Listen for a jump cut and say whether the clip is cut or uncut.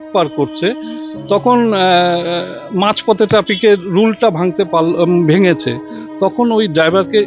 uncut